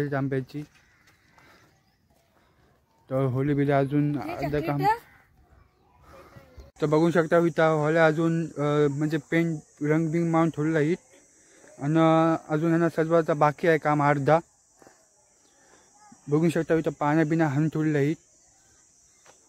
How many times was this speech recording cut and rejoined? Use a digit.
0